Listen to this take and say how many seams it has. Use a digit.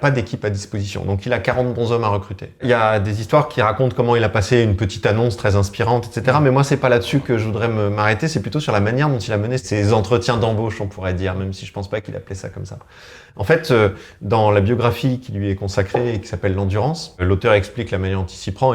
2